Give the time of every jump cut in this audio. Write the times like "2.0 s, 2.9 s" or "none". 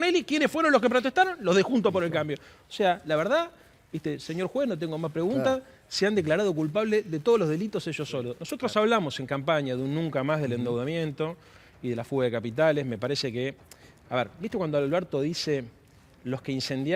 8.4 s